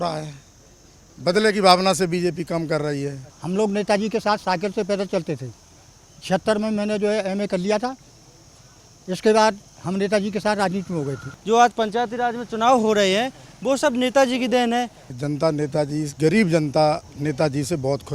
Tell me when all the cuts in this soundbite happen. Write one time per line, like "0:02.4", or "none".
0:03.3
0:11.3
0:15.0